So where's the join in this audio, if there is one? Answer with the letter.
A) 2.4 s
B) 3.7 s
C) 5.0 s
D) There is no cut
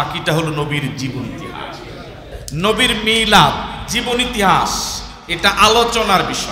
A